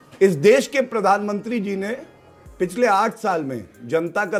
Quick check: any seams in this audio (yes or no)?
no